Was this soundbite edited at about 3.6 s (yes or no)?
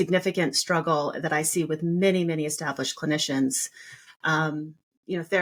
no